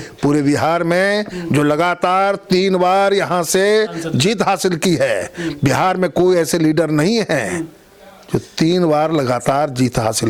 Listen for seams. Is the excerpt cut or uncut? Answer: uncut